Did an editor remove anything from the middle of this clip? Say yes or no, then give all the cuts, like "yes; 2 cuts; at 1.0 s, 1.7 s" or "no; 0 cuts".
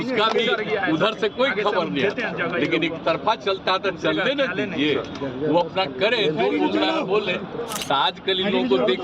yes; 1 cut; at 7.7 s